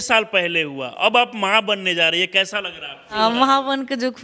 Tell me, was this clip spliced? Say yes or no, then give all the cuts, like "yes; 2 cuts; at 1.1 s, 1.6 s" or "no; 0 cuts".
yes; 1 cut; at 3.1 s